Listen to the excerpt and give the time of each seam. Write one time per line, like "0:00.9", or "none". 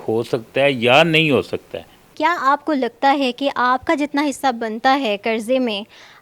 0:02.0